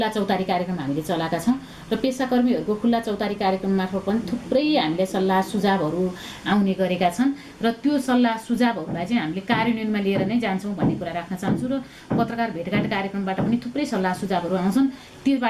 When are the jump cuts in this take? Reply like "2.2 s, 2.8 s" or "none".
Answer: none

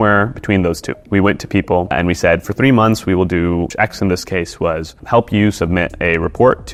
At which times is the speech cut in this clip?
none

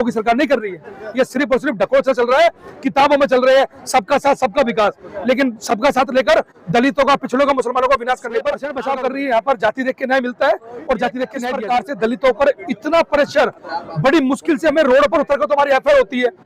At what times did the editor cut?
8.7 s, 11.4 s

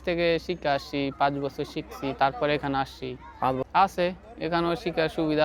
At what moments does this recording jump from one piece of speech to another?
3.6 s

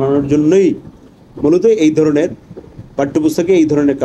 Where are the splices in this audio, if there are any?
none

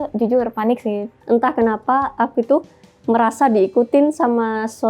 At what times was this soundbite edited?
1.1 s

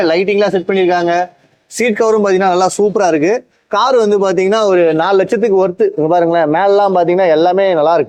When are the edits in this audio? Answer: none

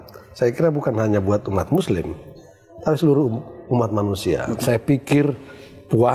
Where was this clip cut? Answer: 4.6 s

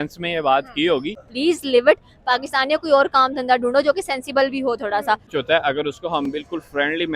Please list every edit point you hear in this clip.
1.2 s, 5.3 s

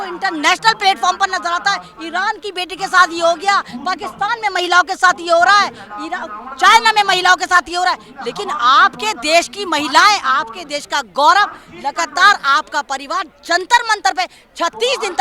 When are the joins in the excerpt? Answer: none

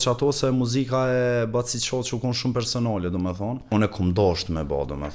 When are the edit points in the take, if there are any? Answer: 3.7 s

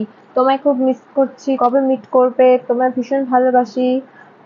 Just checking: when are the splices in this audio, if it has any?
1.6 s

